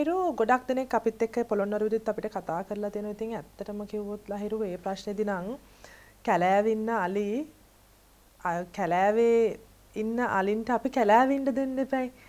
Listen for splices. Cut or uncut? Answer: uncut